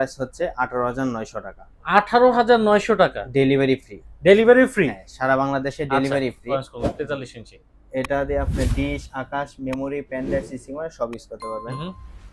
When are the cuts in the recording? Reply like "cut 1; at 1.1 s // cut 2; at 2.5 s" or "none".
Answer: cut 1; at 6.5 s